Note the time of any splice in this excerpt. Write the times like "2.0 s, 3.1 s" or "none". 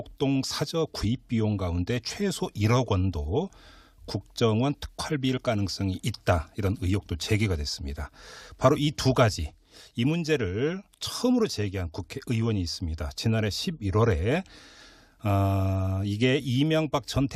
12.7 s

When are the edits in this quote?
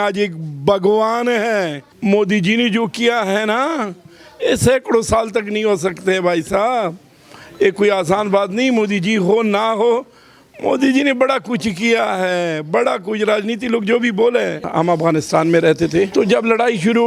1.8 s, 14.7 s, 16.1 s

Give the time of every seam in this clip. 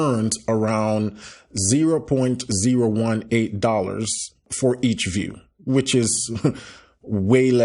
4.5 s

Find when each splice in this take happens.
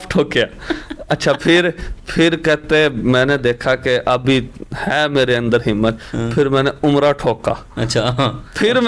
none

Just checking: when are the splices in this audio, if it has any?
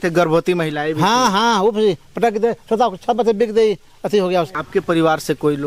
4.5 s

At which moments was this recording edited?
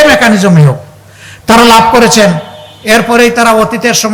none

